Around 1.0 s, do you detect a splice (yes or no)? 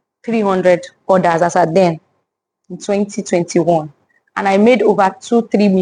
no